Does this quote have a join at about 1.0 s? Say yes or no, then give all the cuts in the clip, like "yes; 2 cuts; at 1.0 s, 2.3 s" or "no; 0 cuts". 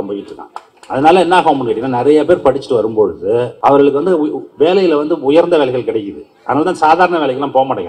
no; 1 cut; at 3.5 s